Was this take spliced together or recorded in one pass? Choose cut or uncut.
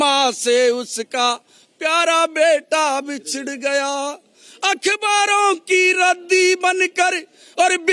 uncut